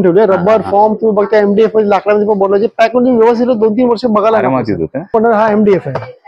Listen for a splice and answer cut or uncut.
cut